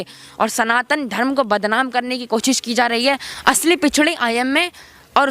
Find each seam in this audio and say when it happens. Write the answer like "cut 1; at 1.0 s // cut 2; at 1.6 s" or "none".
cut 1; at 3.3 s